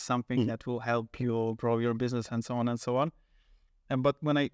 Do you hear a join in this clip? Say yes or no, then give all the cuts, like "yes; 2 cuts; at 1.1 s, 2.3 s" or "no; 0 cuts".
no; 0 cuts